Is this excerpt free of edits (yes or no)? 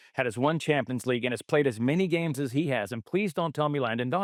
yes